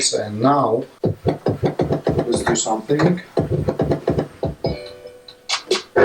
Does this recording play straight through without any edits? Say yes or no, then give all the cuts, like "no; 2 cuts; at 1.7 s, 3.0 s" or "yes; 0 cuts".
no; 1 cut; at 1.0 s